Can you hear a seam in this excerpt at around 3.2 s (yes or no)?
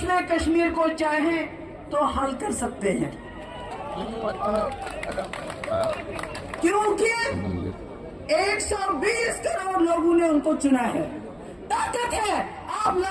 no